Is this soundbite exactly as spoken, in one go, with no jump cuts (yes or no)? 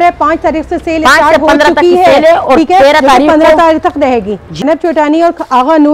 yes